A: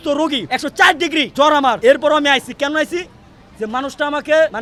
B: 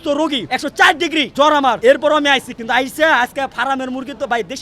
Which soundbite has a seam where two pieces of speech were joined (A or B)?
B